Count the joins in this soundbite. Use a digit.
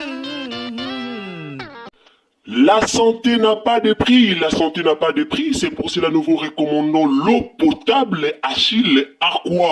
1